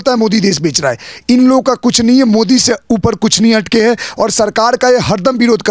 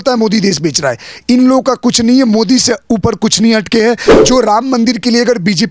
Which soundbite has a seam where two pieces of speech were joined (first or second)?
second